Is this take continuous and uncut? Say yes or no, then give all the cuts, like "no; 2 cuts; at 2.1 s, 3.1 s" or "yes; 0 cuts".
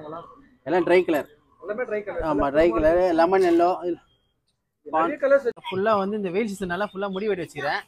no; 1 cut; at 5.6 s